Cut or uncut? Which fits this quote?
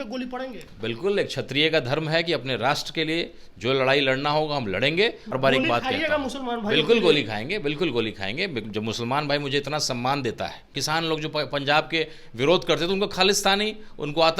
cut